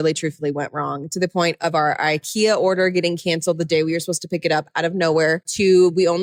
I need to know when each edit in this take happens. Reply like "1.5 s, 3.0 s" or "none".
none